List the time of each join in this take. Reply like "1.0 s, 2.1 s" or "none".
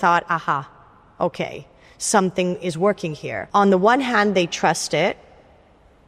3.3 s